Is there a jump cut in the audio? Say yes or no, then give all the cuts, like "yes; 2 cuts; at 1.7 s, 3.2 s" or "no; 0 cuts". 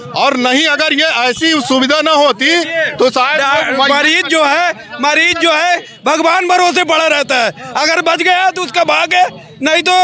no; 0 cuts